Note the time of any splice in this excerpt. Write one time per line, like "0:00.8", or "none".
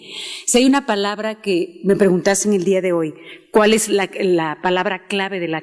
0:01.3